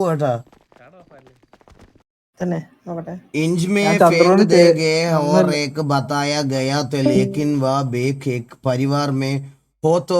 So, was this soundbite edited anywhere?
yes; 1 cut; at 2.0 s

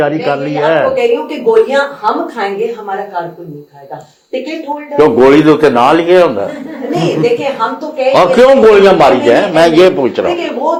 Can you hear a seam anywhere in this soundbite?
no; 0 cuts

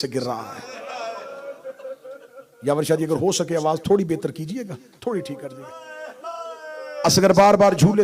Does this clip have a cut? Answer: no; 0 cuts

